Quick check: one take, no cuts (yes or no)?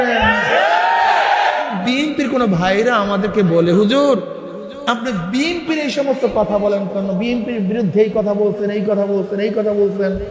no